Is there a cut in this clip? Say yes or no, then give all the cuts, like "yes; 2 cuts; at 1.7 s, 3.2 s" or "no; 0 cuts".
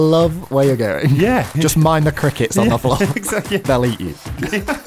yes; 2 cuts; at 1.5 s, 3.6 s